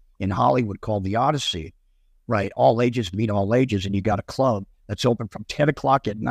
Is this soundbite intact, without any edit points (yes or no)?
yes